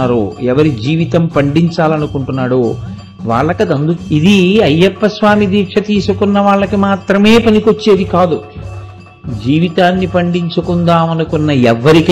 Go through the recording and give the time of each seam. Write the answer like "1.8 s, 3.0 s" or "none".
4.0 s